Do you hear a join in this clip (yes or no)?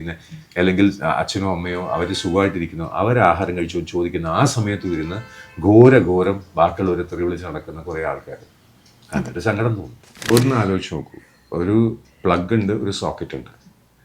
yes